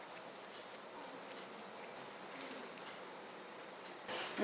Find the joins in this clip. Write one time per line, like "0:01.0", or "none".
0:01.0